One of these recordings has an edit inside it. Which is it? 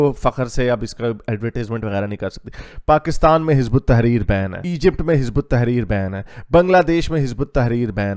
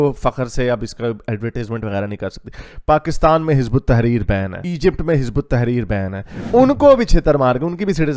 second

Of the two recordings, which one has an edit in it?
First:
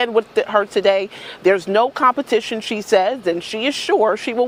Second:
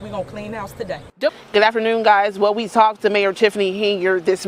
second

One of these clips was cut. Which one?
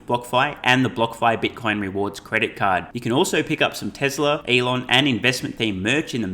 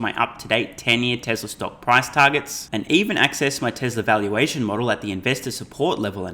first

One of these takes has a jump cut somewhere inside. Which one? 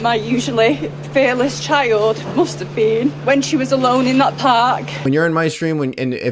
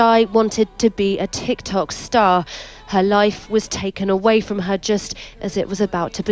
first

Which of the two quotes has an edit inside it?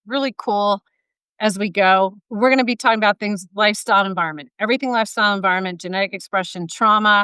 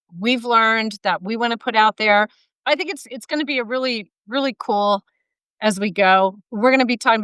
second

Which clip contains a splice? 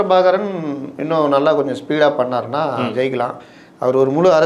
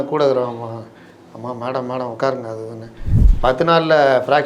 second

